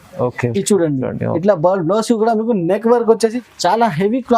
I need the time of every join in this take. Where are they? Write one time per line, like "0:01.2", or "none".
0:03.4